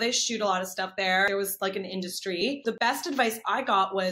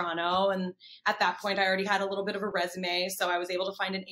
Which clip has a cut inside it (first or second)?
first